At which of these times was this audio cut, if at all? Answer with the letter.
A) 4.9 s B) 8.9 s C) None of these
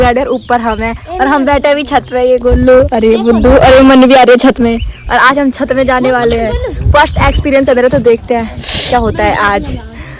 C